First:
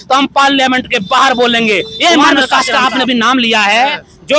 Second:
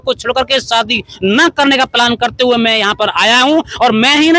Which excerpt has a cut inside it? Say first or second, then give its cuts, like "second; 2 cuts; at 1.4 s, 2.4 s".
first; 1 cut; at 2.4 s